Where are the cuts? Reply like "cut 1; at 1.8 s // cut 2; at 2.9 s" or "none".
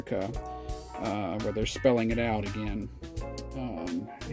none

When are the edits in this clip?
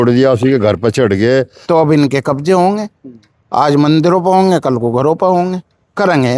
cut 1; at 1.6 s

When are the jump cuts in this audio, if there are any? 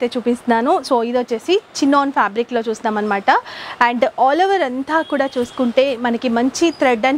none

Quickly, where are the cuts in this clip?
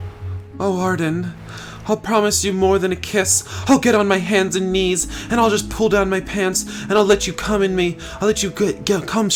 none

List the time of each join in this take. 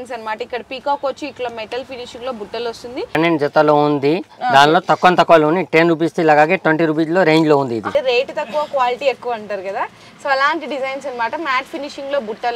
cut 1; at 3.2 s // cut 2; at 7.9 s

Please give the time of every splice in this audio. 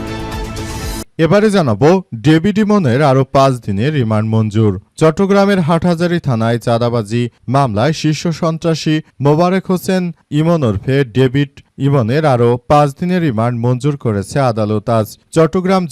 cut 1; at 1.1 s

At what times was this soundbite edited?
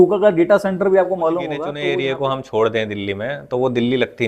cut 1; at 1.7 s

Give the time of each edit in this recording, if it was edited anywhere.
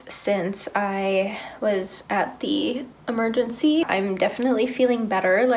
none

